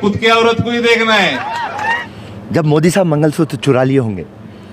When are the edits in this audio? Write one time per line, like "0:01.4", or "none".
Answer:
0:02.1